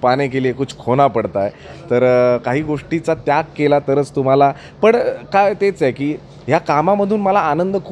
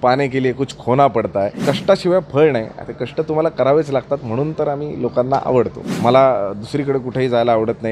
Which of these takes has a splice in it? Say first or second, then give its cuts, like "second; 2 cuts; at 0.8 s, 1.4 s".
second; 2 cuts; at 1.6 s, 5.8 s